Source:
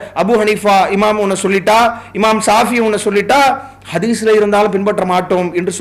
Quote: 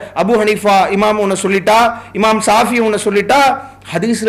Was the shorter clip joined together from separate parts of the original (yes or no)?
no